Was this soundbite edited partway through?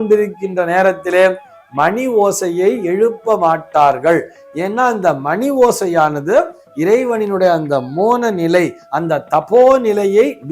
no; 0 cuts

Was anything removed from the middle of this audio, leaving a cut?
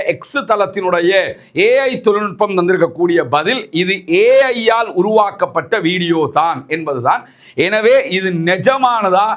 no; 0 cuts

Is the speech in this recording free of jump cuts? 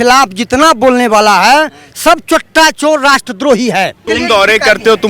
no; 1 cut; at 4.0 s

